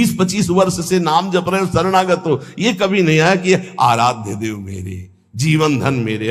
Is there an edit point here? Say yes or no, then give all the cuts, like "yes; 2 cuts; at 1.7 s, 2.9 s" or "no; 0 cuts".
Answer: no; 0 cuts